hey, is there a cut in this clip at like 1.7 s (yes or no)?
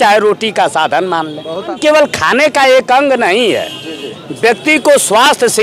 yes